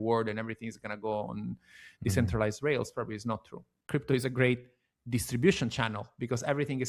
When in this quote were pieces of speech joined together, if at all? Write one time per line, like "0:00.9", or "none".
0:03.8